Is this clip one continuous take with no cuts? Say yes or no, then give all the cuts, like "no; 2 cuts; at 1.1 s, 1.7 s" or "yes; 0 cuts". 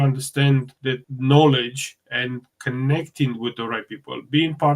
no; 1 cut; at 1.1 s